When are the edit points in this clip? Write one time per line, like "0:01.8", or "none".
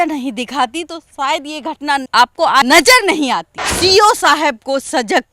0:02.1
0:03.5